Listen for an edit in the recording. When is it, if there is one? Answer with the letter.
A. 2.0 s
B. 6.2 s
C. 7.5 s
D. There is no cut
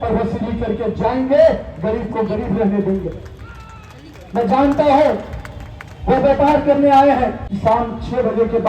C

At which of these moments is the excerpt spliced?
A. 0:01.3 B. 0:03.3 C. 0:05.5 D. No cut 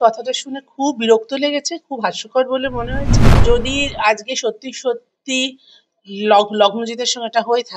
B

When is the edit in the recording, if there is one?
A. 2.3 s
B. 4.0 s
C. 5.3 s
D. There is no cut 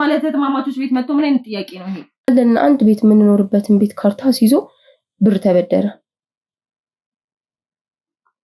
A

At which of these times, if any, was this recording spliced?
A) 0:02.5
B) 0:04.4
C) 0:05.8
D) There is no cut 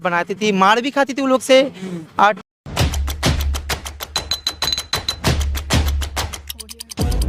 A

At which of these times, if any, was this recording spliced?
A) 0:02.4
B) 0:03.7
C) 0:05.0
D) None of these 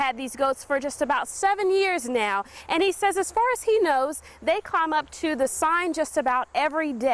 D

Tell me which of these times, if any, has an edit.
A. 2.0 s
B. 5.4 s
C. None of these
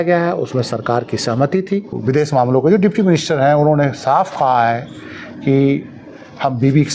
A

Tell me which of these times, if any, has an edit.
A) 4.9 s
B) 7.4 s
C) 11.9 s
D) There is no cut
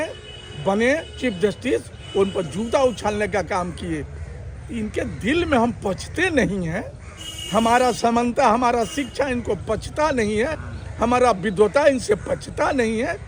D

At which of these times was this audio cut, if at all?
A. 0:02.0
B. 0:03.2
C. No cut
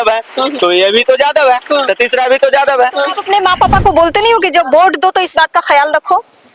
B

